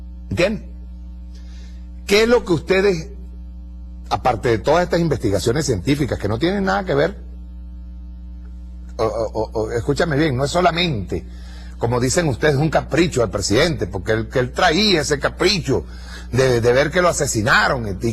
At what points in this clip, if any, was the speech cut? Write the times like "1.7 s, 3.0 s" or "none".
12.1 s

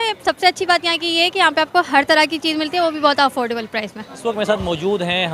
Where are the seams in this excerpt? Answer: 4.1 s

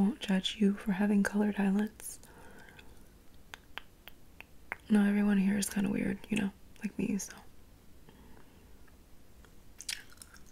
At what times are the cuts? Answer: none

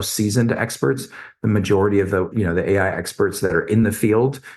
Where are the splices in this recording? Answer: 2.3 s

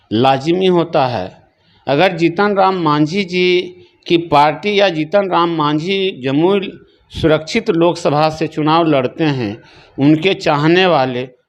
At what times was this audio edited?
none

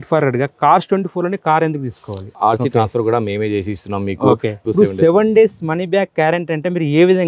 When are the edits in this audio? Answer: 2.3 s, 4.6 s

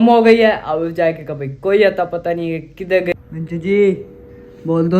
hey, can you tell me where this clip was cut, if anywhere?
3.1 s

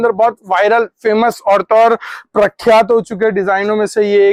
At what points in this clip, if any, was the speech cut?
none

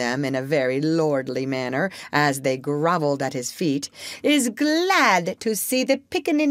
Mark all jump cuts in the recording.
none

